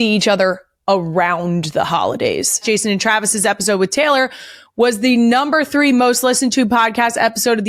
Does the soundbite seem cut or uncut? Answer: cut